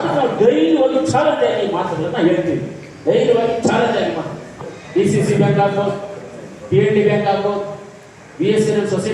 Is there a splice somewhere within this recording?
yes; 1 cut; at 4.5 s

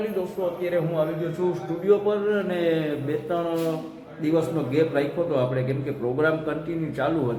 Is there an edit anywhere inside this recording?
no; 0 cuts

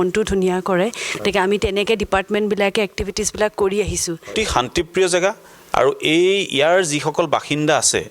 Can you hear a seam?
yes; 1 cut; at 4.3 s

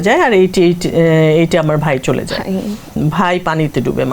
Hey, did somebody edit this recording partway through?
yes; 1 cut; at 2.9 s

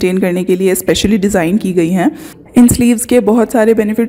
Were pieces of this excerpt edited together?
yes; 1 cut; at 2.3 s

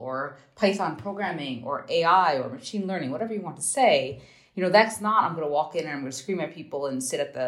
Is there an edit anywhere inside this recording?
no; 0 cuts

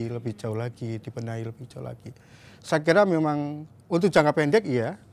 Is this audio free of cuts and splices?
yes; 0 cuts

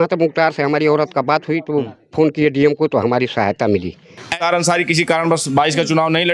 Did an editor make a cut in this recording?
yes; 1 cut; at 4.4 s

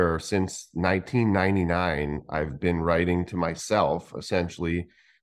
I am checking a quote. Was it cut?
no; 0 cuts

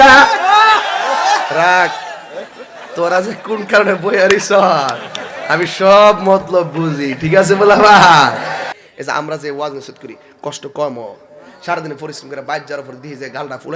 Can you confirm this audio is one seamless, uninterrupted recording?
no; 1 cut; at 8.7 s

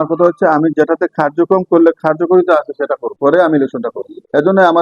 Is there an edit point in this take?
no; 0 cuts

